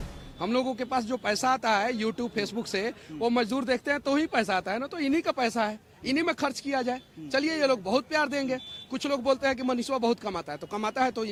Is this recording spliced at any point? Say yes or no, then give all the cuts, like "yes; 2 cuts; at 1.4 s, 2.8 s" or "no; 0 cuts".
no; 0 cuts